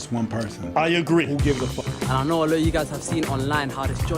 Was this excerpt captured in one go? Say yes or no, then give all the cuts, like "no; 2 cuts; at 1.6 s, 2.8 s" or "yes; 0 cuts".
no; 1 cut; at 1.7 s